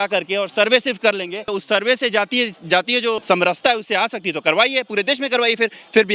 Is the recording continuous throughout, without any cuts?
no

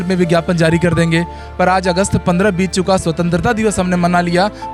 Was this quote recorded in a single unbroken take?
yes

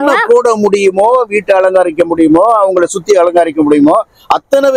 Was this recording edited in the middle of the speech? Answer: no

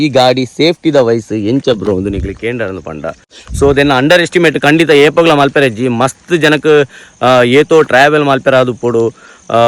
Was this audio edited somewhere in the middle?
yes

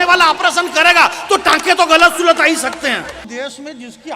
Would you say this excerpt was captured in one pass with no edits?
no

